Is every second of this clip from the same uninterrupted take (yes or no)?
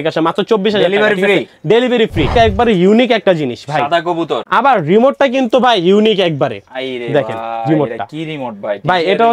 no